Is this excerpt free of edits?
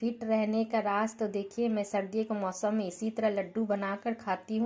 yes; 0 cuts

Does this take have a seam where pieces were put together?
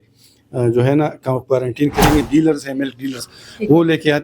yes; 1 cut; at 2.3 s

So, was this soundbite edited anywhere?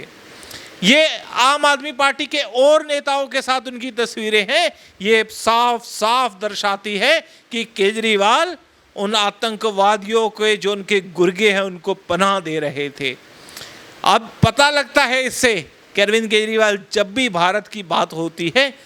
no; 0 cuts

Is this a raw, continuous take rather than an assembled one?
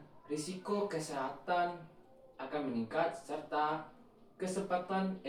yes; 0 cuts

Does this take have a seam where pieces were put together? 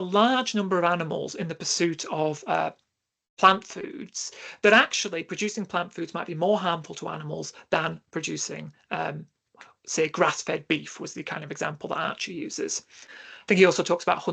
no; 0 cuts

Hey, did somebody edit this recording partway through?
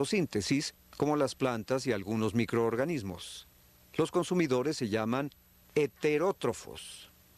no; 0 cuts

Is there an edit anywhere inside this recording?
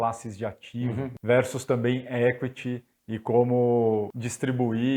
yes; 2 cuts; at 1.2 s, 4.2 s

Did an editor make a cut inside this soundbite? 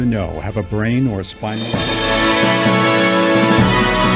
yes; 1 cut; at 1.5 s

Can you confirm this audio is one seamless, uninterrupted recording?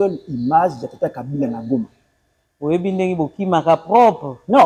yes; 0 cuts

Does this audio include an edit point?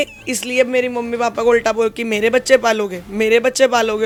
no; 0 cuts

